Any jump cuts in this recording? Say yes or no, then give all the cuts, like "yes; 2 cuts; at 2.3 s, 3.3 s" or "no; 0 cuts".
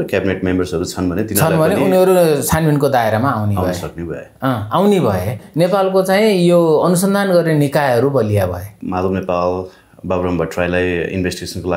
yes; 2 cuts; at 5.4 s, 8.7 s